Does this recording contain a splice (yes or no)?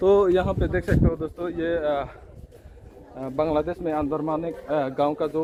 no